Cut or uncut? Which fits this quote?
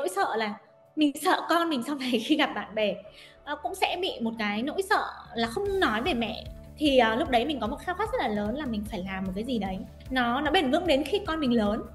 uncut